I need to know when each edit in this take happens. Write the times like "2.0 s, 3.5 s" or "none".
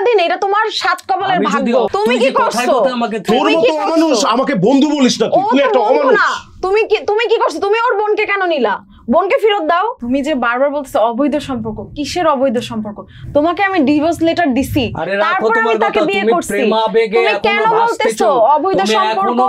1.9 s, 10.0 s